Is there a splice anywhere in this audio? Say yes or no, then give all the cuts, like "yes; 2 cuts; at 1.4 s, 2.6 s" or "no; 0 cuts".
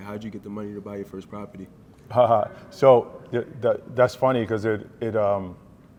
no; 0 cuts